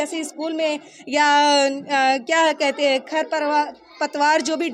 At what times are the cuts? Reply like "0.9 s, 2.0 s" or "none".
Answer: none